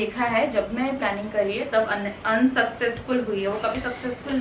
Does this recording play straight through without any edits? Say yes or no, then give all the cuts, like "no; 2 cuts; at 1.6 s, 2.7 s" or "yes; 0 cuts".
yes; 0 cuts